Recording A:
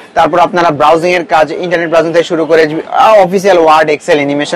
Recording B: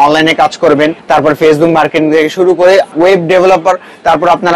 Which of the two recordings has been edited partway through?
B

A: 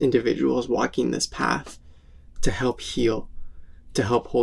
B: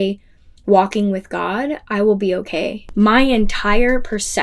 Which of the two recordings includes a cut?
B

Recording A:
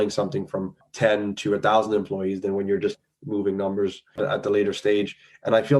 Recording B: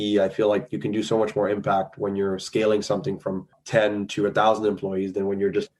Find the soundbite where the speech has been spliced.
A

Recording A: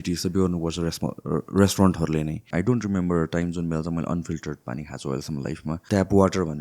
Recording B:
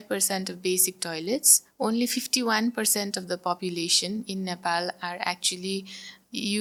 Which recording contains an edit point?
A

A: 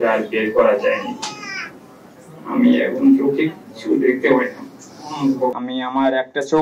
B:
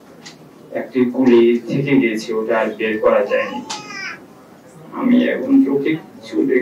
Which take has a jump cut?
A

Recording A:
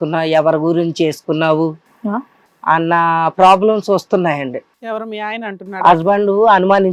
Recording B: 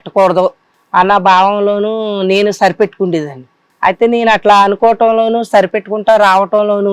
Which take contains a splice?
B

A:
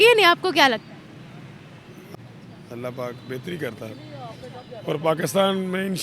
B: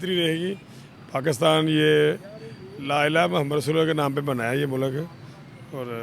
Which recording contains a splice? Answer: A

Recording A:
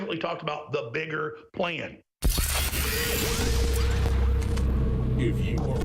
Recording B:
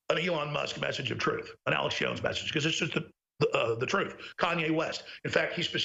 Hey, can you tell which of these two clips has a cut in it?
A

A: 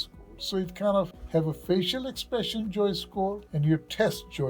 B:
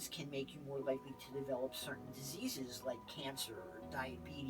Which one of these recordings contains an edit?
A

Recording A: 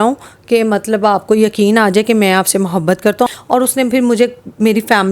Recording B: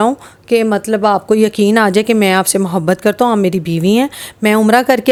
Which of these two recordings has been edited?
A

